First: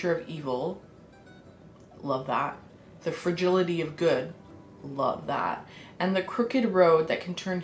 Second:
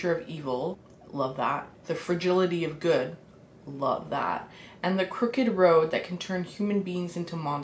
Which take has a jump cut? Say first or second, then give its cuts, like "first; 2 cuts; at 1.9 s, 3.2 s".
second; 2 cuts; at 0.9 s, 1.7 s